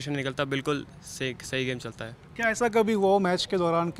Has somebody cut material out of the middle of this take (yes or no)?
no